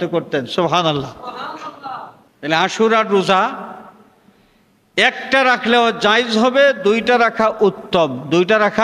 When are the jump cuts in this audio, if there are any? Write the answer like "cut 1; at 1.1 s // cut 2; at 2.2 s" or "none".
cut 1; at 2.2 s